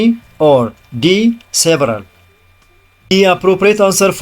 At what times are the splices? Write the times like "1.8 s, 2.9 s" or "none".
3.1 s